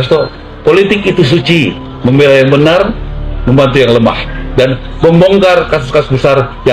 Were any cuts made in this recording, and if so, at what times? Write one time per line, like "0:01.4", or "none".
none